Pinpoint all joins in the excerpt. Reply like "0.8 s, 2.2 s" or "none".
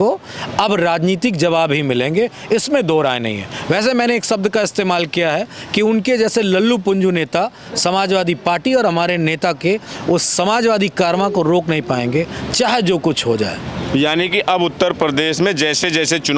none